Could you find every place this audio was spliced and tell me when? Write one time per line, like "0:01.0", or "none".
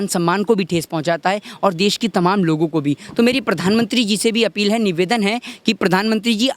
none